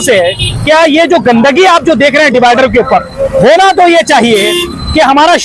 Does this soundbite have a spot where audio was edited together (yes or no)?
no